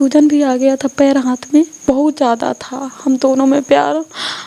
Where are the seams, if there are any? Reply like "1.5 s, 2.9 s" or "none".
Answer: 1.8 s